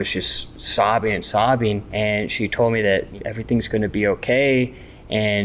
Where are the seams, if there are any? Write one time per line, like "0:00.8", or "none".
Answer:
0:01.9
0:03.1